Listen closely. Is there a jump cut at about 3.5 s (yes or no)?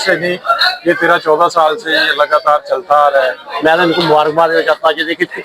yes